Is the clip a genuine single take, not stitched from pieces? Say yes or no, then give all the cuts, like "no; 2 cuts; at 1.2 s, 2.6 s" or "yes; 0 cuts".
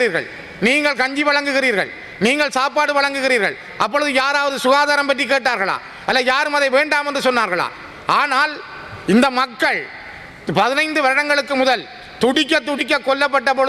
yes; 0 cuts